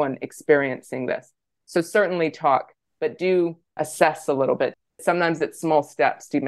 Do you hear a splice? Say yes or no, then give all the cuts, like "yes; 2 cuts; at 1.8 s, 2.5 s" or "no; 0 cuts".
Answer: yes; 2 cuts; at 3.7 s, 4.9 s